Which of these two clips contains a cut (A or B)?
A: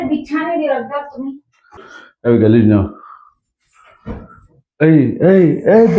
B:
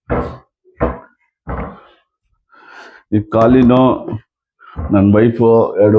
A